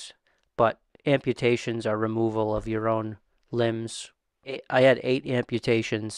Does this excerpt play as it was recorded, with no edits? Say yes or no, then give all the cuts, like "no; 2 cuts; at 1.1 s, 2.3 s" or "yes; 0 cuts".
yes; 0 cuts